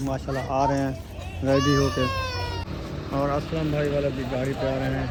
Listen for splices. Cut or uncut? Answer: uncut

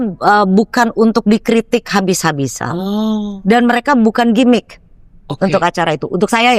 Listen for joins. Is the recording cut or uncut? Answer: uncut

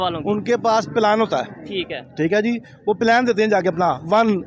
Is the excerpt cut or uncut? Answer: uncut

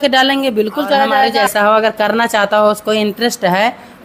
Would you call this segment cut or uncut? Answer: cut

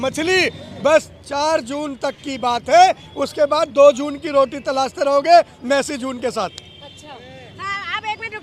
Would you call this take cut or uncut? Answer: uncut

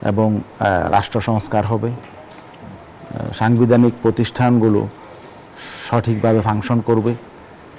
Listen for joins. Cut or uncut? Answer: uncut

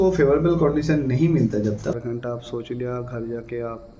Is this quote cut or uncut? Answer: cut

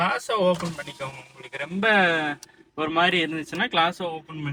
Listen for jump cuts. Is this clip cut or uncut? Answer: uncut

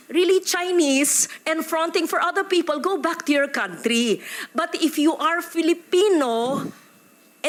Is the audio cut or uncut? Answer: uncut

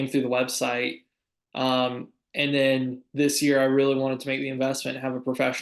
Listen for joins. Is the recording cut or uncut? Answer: uncut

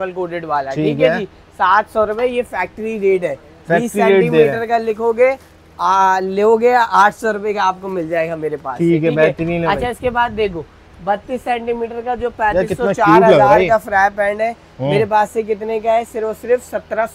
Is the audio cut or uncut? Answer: uncut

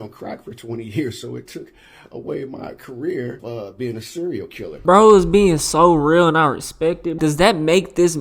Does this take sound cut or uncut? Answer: cut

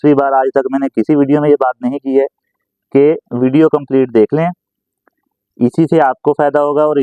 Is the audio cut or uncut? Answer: uncut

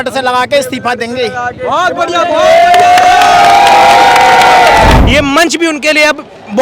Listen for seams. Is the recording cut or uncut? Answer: cut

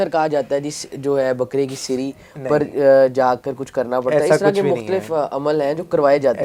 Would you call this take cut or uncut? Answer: uncut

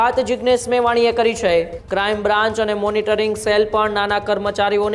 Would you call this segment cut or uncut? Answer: cut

